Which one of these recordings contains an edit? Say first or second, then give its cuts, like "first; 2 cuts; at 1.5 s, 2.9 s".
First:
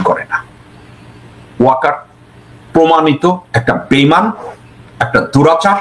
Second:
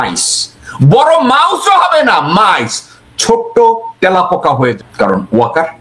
second; 1 cut; at 4.8 s